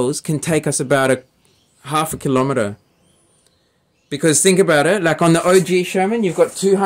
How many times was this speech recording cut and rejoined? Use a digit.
0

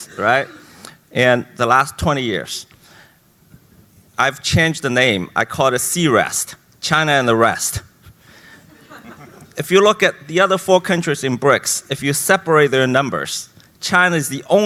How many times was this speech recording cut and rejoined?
0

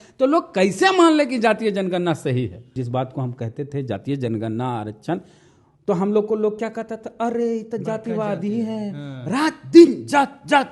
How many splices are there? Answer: 1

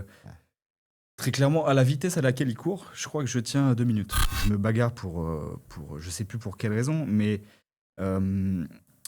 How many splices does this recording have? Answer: 1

